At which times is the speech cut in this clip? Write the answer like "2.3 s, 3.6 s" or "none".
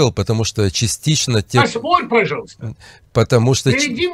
none